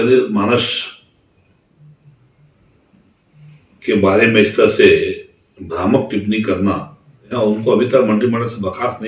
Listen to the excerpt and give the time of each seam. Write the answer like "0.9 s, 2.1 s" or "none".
7.2 s